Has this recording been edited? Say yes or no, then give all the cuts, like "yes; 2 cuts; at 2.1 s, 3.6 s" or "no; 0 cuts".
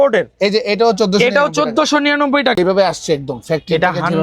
yes; 1 cut; at 2.6 s